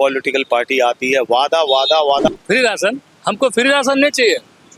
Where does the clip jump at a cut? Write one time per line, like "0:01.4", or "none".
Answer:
0:02.3